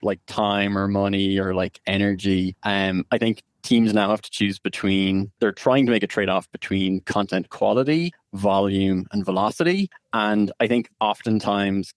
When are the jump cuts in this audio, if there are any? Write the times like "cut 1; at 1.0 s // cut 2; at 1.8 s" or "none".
cut 1; at 2.6 s // cut 2; at 5.3 s // cut 3; at 8.2 s // cut 4; at 10.0 s